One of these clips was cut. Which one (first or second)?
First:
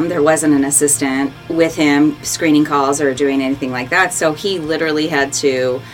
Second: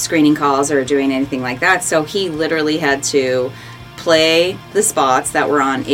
first